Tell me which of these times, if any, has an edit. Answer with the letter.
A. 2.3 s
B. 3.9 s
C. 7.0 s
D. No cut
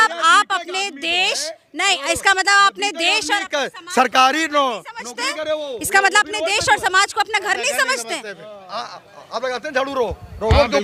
D